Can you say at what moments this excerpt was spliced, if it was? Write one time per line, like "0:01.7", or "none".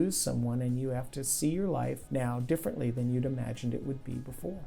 0:02.0